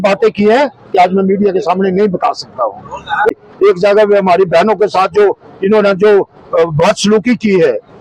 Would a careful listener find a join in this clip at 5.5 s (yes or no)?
no